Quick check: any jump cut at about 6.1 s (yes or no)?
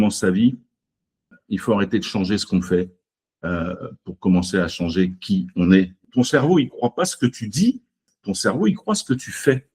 yes